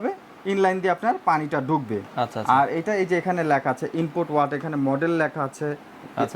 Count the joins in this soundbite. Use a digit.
0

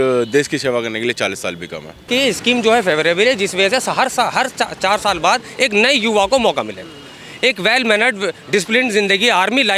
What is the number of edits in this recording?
1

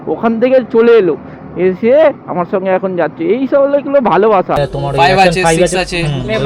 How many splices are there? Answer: 1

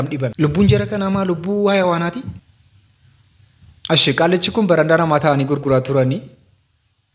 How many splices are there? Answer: 0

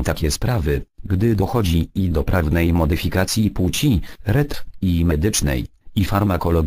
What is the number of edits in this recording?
1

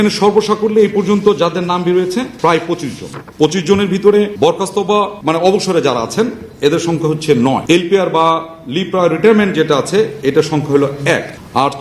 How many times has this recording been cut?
0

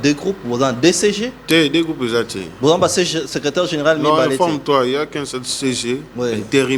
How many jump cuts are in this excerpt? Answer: 0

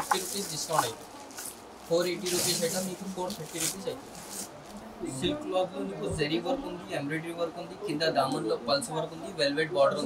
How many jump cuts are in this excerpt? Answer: 1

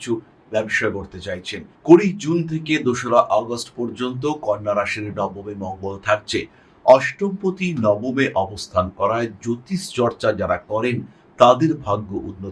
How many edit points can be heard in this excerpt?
1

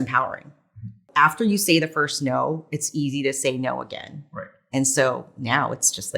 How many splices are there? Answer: 1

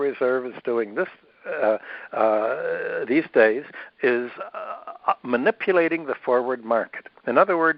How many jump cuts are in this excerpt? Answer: 0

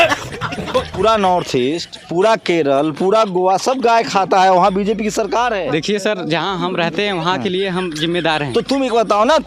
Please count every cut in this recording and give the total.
2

